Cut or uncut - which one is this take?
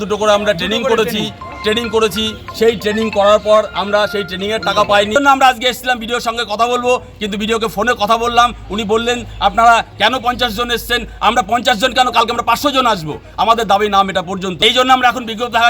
cut